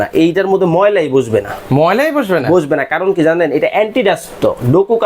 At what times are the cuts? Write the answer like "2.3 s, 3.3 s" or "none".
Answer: none